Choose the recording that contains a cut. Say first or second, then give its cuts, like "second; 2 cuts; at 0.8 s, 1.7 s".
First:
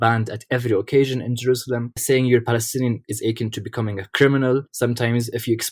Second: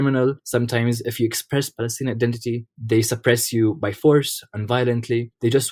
first; 2 cuts; at 2.0 s, 3.1 s